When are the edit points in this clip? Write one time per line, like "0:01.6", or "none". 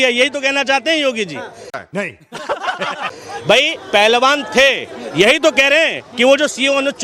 0:01.8
0:03.1